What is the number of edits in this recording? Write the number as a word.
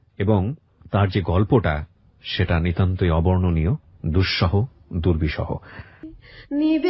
one